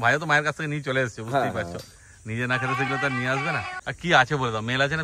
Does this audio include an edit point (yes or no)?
no